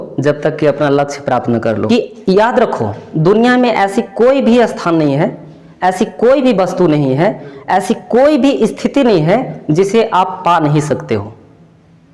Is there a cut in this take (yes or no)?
yes